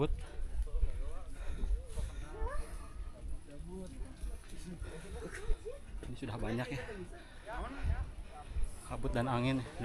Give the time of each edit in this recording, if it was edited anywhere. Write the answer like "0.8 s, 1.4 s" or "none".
none